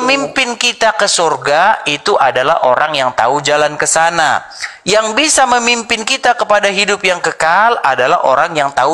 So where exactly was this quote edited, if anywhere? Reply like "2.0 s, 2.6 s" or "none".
none